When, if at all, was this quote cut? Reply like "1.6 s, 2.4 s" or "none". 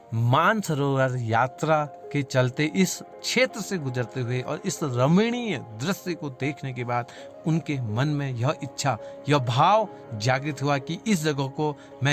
none

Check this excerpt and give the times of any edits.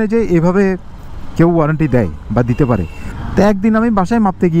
3.0 s

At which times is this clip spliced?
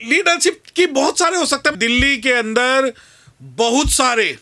1.7 s

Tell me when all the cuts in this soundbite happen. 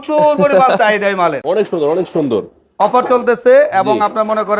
1.4 s

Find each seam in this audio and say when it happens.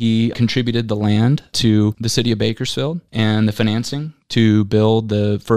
3.0 s

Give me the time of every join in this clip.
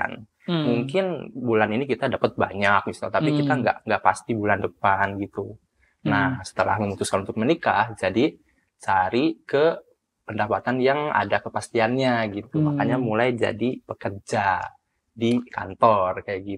none

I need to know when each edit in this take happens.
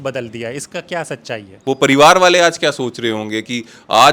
1.5 s

